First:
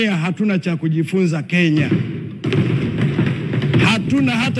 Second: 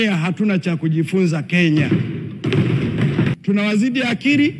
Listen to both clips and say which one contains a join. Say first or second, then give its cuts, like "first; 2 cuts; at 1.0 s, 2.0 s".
second; 1 cut; at 3.4 s